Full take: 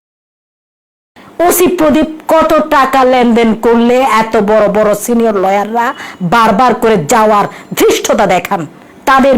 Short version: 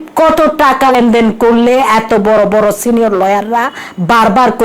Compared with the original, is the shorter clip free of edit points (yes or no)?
no